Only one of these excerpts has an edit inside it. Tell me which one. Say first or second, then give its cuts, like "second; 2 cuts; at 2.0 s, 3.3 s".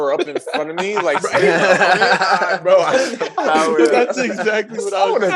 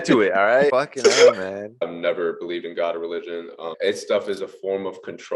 second; 3 cuts; at 0.7 s, 1.8 s, 3.7 s